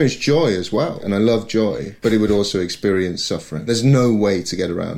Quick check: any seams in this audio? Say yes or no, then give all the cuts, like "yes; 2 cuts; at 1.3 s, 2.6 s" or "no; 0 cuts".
yes; 2 cuts; at 1.0 s, 3.7 s